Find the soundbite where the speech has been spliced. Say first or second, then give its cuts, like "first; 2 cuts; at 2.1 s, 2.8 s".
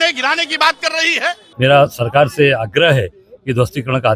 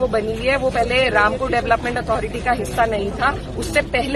first; 1 cut; at 1.4 s